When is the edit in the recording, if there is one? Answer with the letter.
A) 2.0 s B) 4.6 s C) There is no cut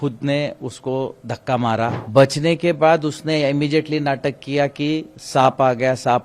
A